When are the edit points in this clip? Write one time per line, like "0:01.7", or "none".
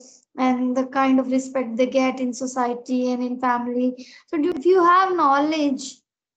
0:04.5